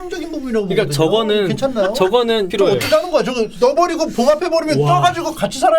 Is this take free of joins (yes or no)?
no